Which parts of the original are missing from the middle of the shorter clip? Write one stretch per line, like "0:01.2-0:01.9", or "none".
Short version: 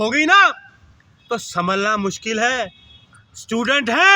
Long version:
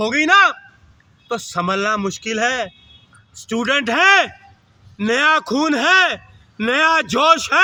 none